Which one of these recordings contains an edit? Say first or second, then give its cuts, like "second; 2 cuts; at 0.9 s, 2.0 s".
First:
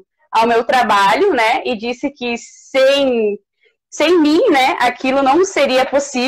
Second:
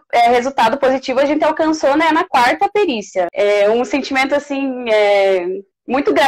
second; 1 cut; at 3.3 s